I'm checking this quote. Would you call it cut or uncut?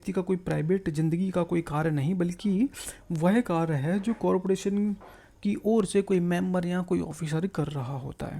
uncut